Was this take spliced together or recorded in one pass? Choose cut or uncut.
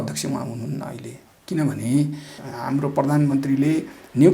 cut